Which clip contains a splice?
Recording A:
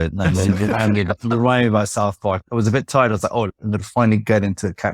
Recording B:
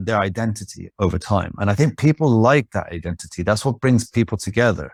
A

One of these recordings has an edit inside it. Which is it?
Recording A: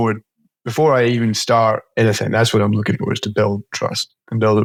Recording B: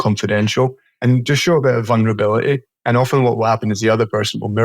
B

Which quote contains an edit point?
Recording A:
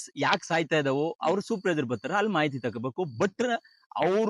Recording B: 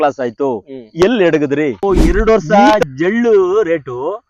B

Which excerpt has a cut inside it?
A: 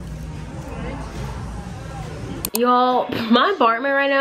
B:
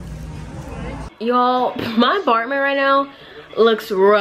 B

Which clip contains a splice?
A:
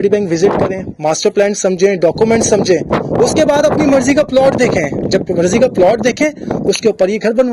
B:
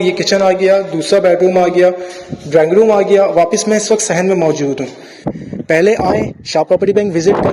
B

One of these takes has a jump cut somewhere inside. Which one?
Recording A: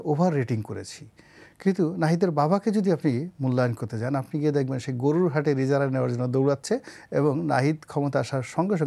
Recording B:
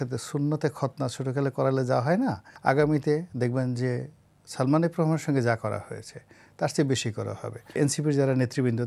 B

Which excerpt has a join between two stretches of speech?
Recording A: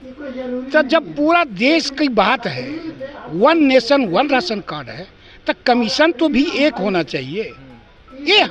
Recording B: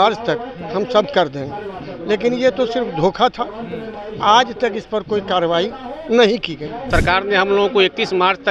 B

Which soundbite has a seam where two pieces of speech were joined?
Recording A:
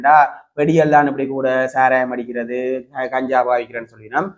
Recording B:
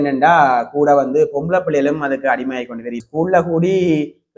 B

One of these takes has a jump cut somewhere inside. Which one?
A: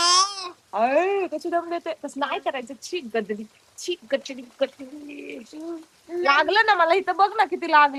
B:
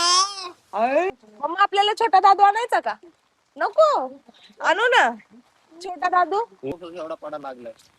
B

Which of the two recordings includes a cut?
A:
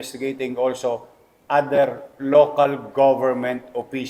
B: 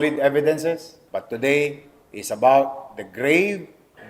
B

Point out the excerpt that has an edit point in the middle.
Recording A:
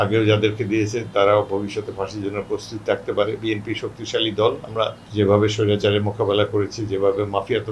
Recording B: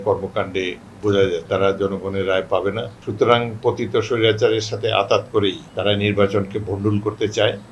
B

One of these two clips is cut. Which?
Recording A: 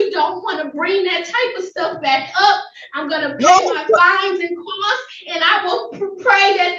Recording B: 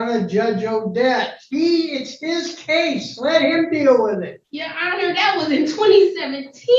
B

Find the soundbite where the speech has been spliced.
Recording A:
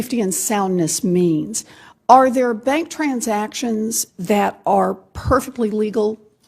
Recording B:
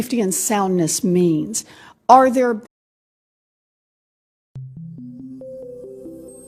A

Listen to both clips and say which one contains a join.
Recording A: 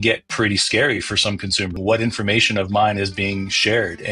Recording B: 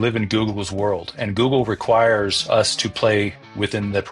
A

